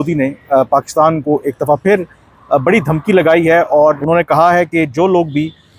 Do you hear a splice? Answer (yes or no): yes